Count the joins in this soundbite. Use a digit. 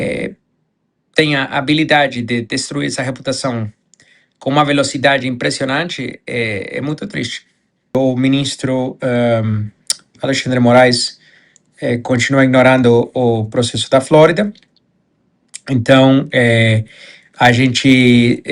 1